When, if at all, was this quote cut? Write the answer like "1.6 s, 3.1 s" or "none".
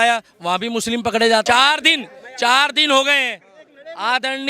1.4 s